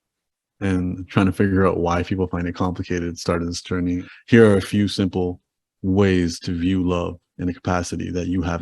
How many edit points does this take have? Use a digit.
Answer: 1